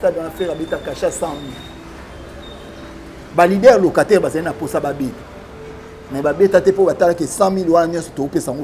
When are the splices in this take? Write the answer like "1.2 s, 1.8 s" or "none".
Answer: none